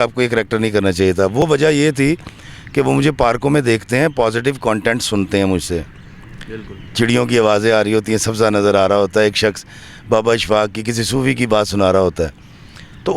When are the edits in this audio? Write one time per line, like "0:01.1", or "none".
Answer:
none